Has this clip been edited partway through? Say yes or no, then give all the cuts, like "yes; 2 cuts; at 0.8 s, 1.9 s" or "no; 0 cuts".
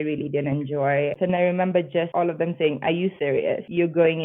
yes; 3 cuts; at 1.1 s, 2.1 s, 3.3 s